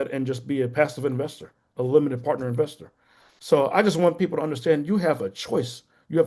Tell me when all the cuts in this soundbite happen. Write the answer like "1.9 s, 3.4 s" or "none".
none

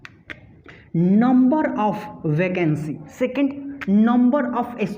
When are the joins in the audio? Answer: 3.0 s

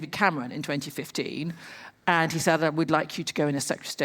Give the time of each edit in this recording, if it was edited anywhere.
1.9 s

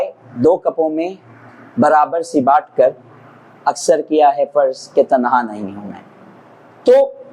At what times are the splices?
none

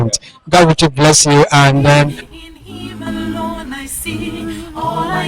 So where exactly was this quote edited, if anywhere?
2.3 s

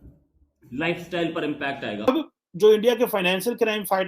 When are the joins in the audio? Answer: 1.9 s

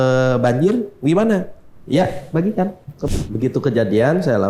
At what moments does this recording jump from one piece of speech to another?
2.9 s

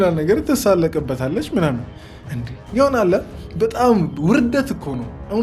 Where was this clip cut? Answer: none

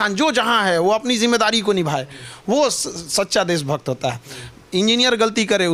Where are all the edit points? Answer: none

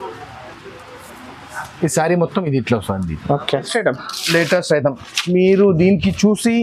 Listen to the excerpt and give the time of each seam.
3.7 s

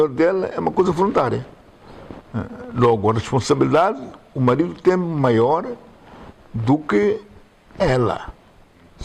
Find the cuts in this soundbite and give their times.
none

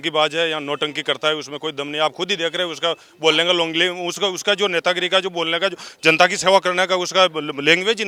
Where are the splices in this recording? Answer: none

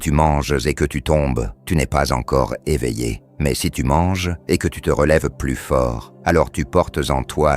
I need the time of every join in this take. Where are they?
1.5 s, 3.2 s, 4.3 s, 6.1 s

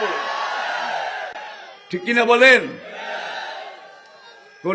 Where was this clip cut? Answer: none

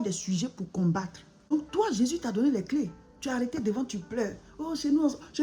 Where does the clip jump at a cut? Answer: 1.5 s

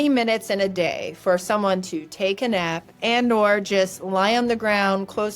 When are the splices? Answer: 2.9 s

